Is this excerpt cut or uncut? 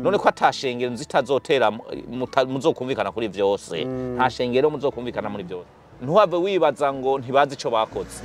cut